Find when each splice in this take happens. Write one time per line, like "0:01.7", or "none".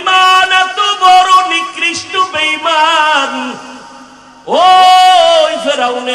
none